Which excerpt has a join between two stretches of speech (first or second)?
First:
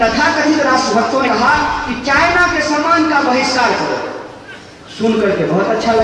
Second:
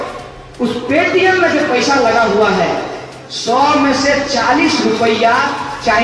first